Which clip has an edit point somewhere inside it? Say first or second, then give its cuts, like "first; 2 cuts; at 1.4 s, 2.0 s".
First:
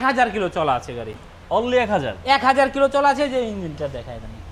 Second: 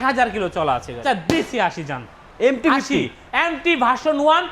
second; 1 cut; at 1.0 s